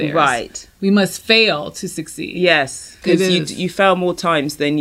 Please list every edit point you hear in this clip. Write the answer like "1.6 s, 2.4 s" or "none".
2.9 s